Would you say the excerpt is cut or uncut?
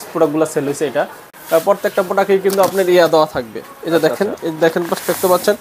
cut